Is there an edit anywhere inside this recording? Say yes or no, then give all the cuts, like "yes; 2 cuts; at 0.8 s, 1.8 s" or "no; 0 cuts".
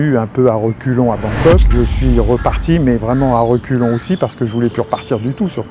no; 0 cuts